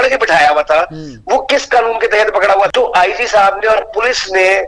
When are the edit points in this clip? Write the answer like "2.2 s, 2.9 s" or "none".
2.7 s